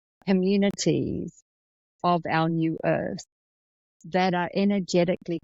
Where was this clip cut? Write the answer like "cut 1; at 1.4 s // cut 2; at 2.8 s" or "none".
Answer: none